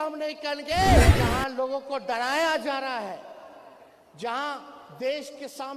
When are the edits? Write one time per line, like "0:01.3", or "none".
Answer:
0:01.1